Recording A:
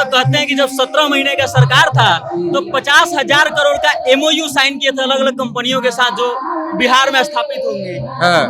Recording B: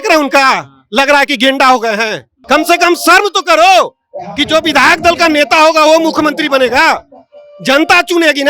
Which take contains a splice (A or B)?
B